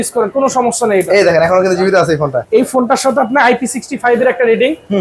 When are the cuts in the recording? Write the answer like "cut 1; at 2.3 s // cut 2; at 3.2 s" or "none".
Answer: cut 1; at 2.4 s